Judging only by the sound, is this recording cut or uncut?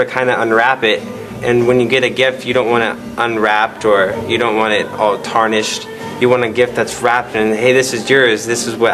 uncut